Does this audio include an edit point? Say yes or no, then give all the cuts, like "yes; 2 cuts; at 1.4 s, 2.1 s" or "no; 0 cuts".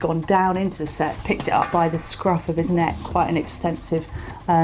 yes; 1 cut; at 1.7 s